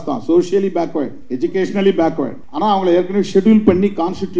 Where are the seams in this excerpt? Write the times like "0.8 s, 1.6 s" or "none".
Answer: 1.2 s, 2.4 s

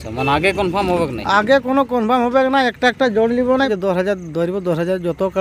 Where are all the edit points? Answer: 3.7 s

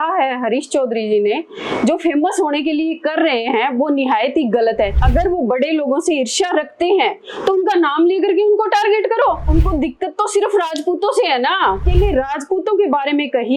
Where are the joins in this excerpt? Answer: 5.0 s, 9.5 s, 11.8 s

